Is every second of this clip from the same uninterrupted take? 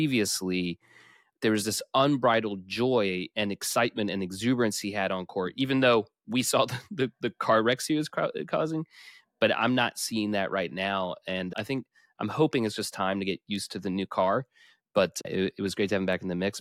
yes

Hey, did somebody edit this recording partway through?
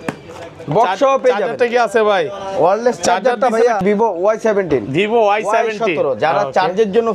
yes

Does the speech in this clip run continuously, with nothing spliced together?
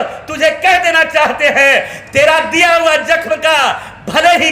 yes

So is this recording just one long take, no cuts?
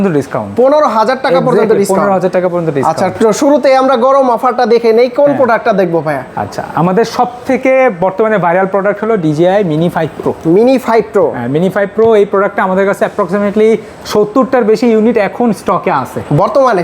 yes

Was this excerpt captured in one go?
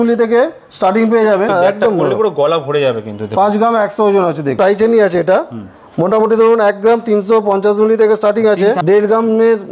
no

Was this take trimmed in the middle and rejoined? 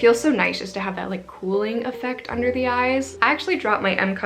yes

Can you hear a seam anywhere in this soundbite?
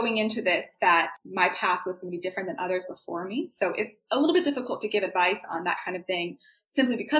yes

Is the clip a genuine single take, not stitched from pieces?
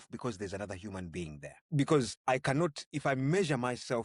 no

